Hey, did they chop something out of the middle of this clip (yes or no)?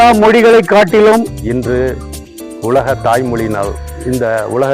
yes